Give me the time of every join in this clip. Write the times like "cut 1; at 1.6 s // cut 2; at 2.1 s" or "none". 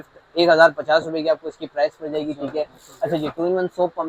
none